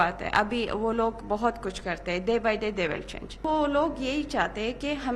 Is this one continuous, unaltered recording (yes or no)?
no